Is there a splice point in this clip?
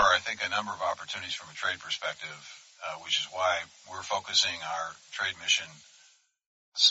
no; 0 cuts

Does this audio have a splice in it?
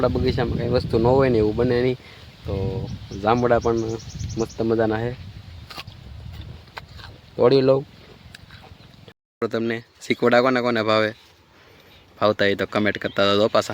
yes; 1 cut; at 9.4 s

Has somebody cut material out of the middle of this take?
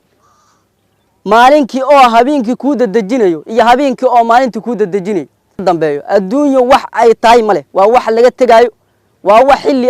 yes; 1 cut; at 5.6 s

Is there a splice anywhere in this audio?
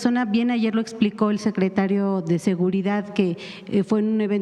no; 0 cuts

